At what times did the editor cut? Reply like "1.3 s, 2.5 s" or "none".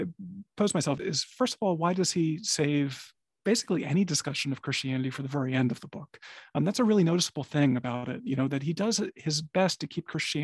1.0 s